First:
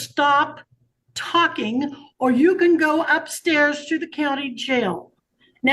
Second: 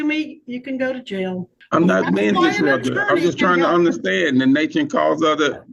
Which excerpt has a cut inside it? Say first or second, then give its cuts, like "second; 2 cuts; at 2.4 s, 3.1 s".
second; 1 cut; at 1.5 s